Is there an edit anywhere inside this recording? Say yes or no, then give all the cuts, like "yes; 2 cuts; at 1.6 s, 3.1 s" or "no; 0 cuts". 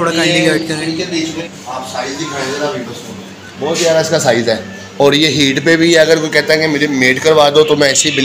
yes; 1 cut; at 1.4 s